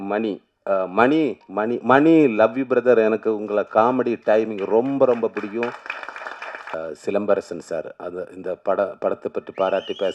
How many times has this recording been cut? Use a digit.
1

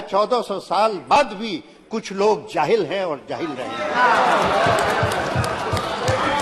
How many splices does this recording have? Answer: 1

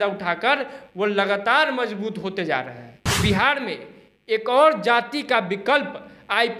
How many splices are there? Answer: 1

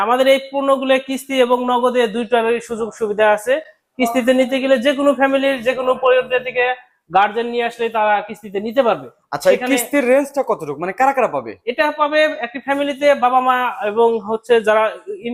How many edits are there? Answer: 0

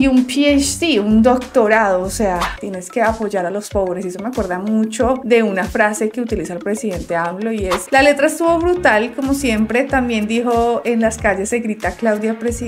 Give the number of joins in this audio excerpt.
2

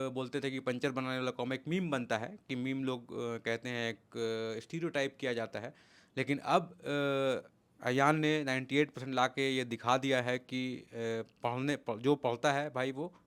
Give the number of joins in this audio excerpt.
0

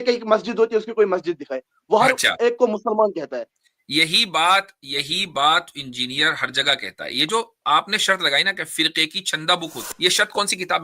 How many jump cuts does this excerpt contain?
1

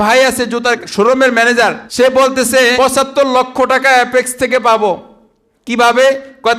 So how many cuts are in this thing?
3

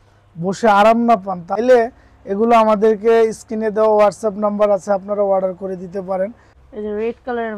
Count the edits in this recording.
2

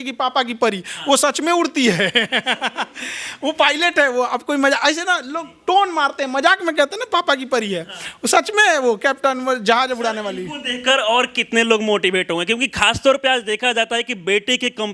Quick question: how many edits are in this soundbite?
0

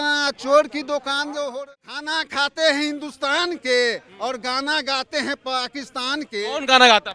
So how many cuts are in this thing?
1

